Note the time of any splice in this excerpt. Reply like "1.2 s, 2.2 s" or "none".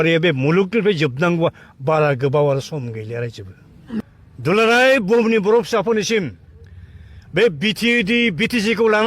4.0 s